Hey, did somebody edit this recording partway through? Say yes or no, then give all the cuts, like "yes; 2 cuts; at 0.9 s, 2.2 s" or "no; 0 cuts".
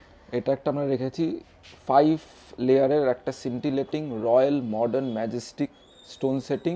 no; 0 cuts